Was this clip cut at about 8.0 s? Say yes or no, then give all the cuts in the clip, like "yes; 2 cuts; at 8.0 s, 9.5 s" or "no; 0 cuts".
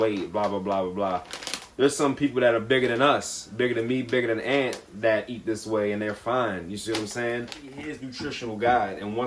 yes; 1 cut; at 8.0 s